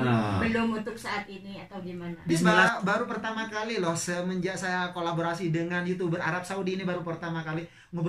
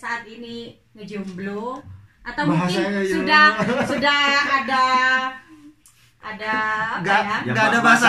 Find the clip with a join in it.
first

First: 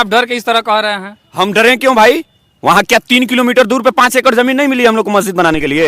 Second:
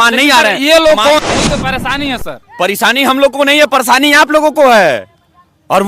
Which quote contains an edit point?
second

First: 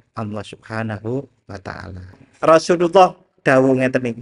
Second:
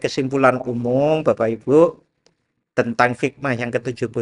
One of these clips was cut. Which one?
first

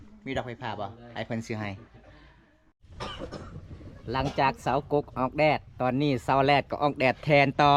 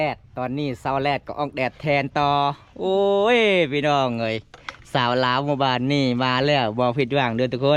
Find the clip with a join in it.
first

